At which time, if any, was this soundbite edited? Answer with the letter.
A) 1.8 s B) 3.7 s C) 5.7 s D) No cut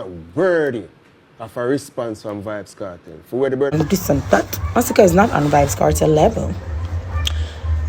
B